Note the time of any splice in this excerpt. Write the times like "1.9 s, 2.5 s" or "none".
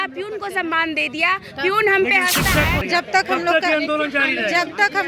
2.8 s